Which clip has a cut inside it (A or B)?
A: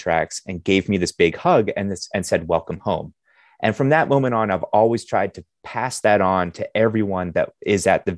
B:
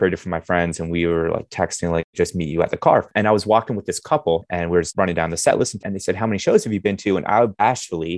B